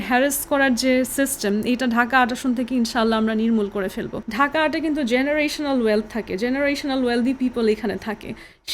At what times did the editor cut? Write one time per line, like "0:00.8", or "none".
0:04.2